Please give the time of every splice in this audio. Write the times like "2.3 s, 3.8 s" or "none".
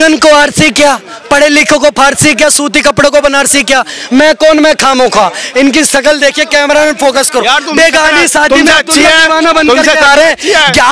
none